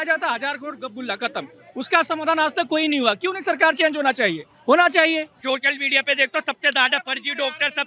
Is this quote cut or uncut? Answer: cut